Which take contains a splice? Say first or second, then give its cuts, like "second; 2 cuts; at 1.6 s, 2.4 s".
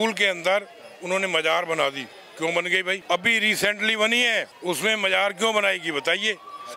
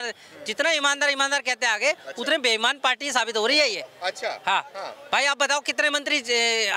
first; 2 cuts; at 3.0 s, 4.5 s